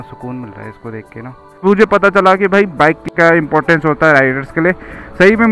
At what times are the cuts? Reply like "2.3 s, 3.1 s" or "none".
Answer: 1.5 s, 2.9 s